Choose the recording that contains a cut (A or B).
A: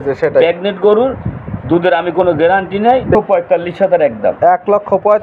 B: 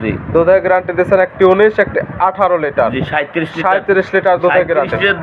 A